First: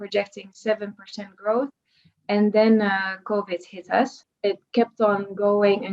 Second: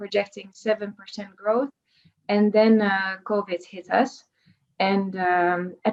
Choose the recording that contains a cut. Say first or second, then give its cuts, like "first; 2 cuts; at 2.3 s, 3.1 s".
first; 1 cut; at 4.2 s